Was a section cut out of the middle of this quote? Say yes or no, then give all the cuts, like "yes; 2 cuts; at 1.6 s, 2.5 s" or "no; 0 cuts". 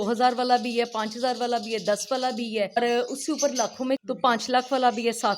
yes; 2 cuts; at 2.8 s, 4.0 s